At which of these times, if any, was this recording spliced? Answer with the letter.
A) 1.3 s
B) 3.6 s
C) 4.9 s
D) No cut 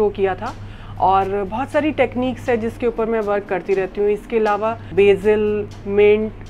C